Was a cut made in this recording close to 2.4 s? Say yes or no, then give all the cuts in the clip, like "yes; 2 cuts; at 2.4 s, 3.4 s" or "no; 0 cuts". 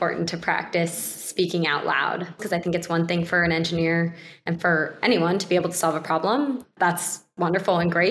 yes; 2 cuts; at 2.4 s, 6.7 s